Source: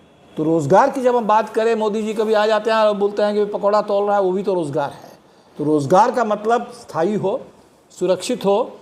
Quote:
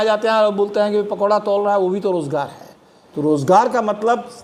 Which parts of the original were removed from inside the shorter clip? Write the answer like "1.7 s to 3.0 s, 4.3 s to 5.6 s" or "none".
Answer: none